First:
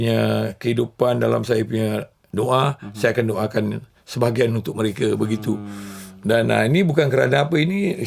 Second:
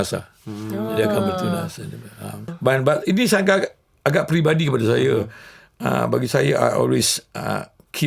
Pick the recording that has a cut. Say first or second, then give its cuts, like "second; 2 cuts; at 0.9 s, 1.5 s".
second; 1 cut; at 2.5 s